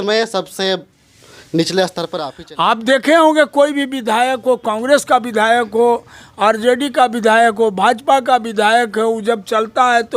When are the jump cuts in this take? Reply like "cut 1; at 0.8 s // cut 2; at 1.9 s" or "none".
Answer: cut 1; at 2.1 s